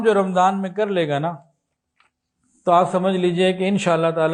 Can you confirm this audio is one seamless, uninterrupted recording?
yes; 0 cuts

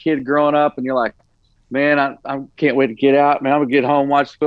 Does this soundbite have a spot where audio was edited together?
no; 0 cuts

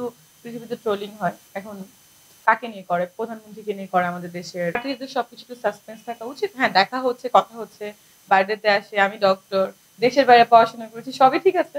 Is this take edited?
yes; 2 cuts; at 1.4 s, 4.8 s

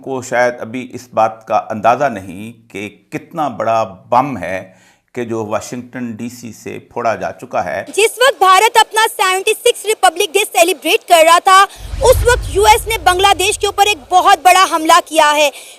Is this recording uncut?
no; 1 cut; at 7.9 s

